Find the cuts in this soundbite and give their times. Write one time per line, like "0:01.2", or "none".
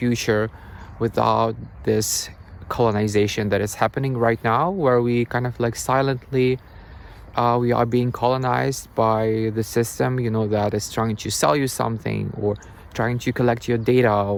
none